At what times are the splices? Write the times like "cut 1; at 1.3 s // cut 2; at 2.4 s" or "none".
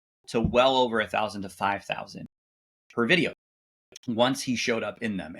cut 1; at 2.3 s